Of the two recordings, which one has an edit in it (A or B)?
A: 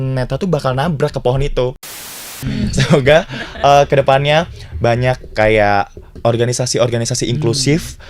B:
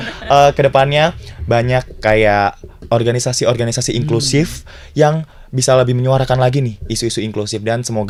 A